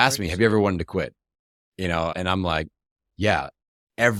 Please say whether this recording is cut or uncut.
uncut